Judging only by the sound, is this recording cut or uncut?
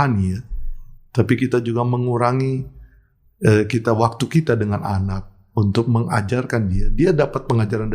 uncut